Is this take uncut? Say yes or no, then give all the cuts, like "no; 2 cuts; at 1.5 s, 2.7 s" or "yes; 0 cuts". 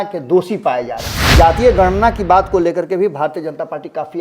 no; 1 cut; at 1.2 s